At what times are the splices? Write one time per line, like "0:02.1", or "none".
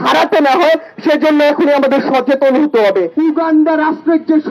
0:03.1